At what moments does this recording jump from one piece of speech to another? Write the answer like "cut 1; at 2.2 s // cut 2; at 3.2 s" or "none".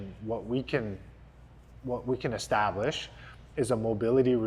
none